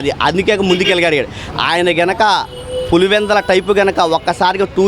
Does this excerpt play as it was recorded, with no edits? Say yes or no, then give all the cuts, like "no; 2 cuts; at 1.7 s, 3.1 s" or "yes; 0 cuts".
yes; 0 cuts